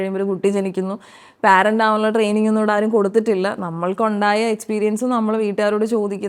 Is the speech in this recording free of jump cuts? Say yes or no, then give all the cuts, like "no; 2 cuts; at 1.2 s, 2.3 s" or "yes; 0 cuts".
yes; 0 cuts